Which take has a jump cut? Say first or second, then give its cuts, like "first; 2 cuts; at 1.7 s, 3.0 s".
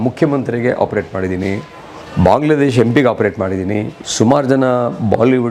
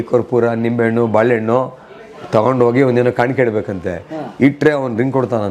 first; 1 cut; at 4.0 s